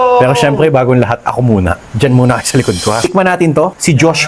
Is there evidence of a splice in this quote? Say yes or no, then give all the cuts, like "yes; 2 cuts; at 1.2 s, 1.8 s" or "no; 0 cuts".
yes; 1 cut; at 3.0 s